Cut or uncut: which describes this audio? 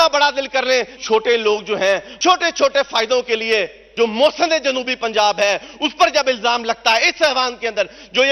cut